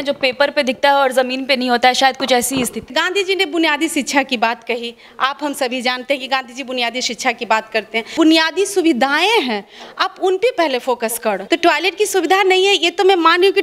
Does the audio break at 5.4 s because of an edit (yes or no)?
no